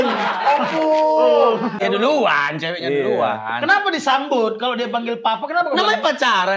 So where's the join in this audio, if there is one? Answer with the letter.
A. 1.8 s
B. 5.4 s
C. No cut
A